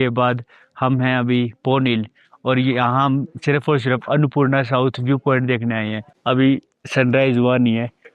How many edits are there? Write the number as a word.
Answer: one